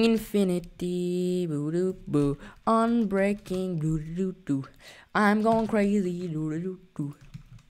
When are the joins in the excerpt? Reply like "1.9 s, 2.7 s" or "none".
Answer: none